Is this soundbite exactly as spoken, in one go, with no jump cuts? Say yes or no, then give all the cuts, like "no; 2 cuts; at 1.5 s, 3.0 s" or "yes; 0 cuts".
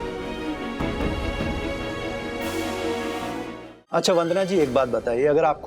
no; 1 cut; at 3.6 s